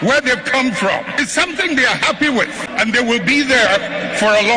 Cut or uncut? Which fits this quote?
cut